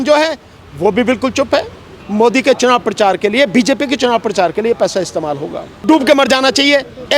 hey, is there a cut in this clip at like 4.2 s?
no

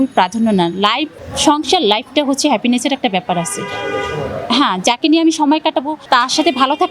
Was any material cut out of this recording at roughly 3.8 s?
no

